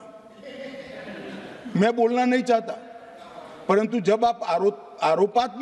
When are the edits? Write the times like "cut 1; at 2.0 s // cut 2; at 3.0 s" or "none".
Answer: none